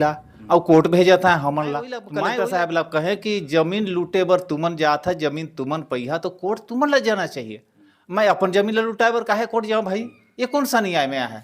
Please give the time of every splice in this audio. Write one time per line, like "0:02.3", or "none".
0:02.0